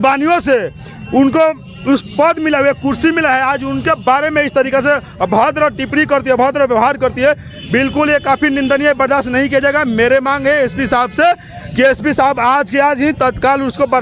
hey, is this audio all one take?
yes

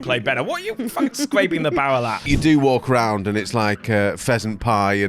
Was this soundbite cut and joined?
yes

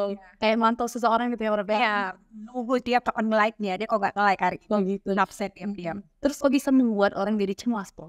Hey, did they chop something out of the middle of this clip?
yes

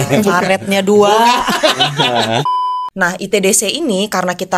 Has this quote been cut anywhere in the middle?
yes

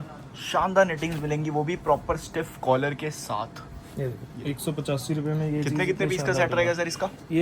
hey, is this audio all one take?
yes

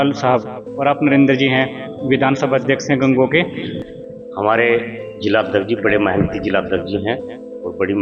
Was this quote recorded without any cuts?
no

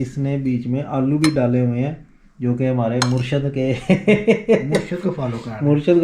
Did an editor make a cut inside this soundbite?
no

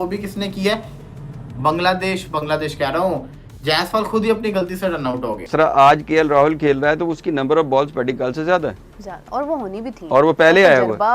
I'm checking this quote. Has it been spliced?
yes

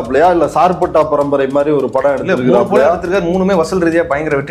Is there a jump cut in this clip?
no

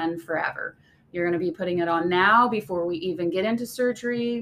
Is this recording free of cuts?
yes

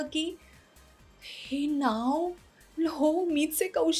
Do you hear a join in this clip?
no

